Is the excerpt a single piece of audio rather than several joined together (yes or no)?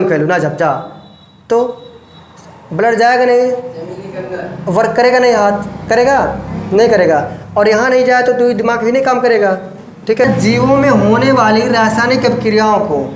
no